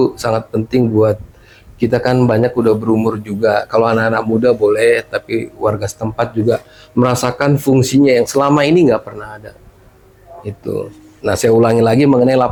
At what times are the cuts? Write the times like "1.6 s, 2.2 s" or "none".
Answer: none